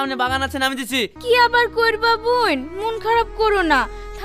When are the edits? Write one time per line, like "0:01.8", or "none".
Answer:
0:01.1